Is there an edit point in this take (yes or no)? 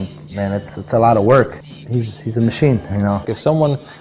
no